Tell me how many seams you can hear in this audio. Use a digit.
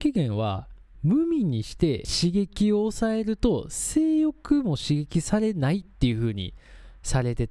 1